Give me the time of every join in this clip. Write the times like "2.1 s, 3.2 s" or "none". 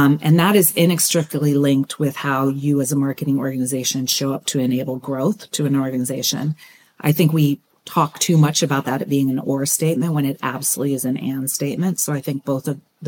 none